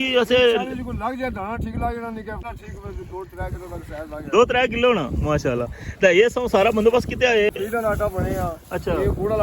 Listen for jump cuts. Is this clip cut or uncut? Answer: cut